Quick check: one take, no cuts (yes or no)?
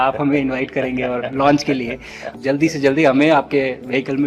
no